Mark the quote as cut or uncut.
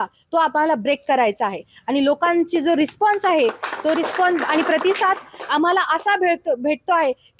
uncut